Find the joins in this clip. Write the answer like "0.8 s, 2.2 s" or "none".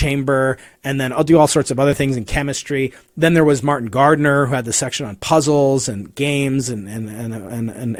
none